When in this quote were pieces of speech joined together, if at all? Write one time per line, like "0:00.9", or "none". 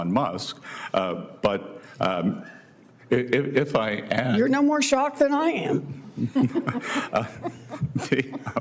none